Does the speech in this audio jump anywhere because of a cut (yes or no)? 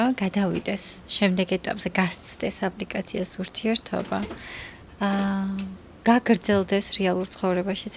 no